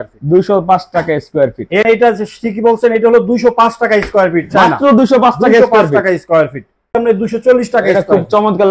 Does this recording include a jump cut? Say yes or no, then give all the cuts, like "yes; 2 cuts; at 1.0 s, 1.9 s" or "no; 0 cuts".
yes; 2 cuts; at 1.8 s, 6.9 s